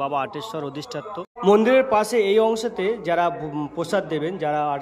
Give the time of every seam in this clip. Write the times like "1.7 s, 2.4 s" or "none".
1.3 s